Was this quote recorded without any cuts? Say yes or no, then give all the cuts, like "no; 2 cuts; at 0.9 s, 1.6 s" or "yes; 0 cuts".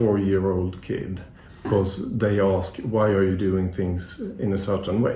no; 1 cut; at 1.7 s